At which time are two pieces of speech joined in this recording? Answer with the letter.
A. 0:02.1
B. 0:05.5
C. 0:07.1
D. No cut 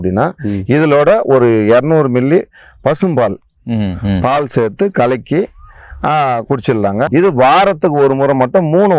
C